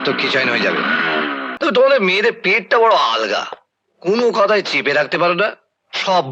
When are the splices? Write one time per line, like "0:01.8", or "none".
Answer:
0:01.5